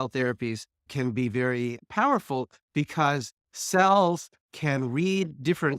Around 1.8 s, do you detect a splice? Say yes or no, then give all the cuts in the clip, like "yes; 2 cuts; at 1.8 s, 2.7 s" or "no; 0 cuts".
yes; 1 cut; at 1.8 s